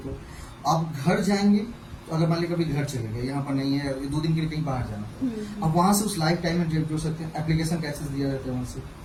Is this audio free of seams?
yes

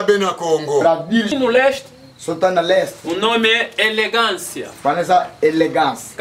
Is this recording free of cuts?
no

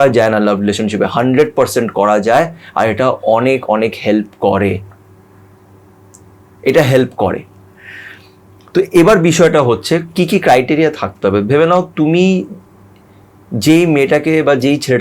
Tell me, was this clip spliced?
no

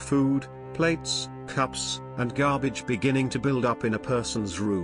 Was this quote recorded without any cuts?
yes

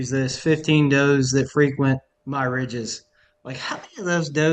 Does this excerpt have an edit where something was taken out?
yes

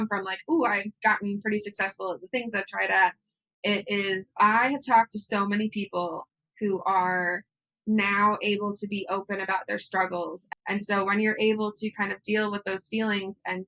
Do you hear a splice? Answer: yes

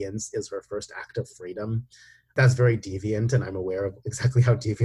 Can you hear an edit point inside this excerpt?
yes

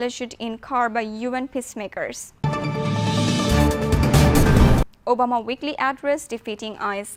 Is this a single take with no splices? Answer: yes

